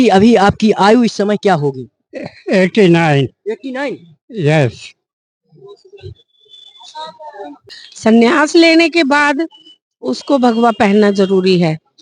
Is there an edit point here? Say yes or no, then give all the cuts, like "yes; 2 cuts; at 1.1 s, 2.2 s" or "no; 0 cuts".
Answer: yes; 1 cut; at 7.7 s